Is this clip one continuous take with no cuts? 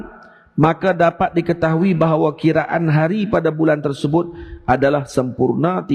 yes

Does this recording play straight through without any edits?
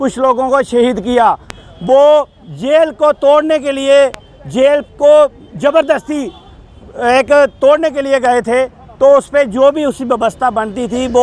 yes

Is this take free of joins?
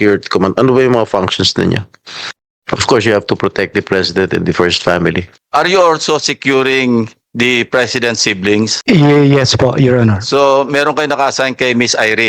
no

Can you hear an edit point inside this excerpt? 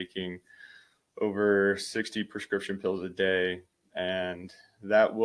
no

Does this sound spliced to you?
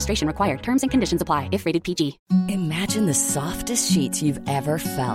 yes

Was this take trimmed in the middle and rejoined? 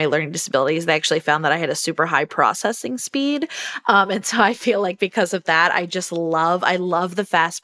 no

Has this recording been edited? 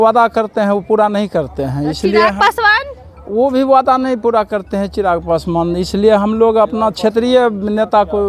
no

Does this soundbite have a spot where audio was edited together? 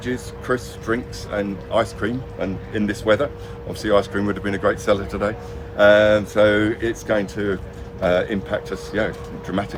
no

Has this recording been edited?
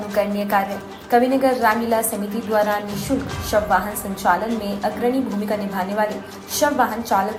no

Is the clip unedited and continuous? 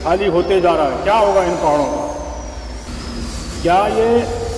yes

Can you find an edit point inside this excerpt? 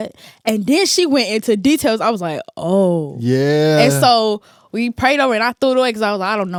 no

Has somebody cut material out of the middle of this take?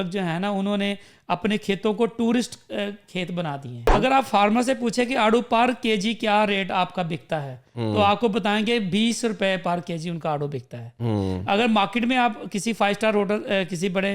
yes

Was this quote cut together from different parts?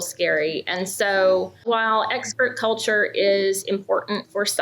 yes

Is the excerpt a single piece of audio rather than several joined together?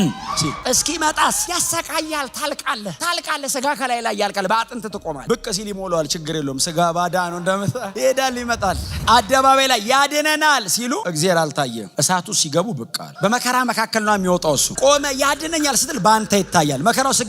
no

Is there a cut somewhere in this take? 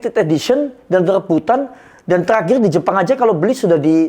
no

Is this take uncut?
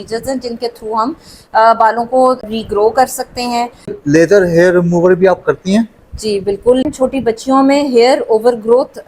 no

